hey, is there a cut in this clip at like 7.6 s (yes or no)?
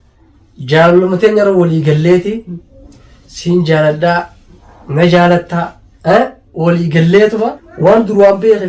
yes